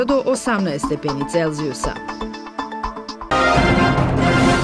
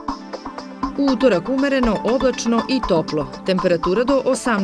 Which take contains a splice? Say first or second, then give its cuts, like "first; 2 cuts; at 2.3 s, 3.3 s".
first; 1 cut; at 3.1 s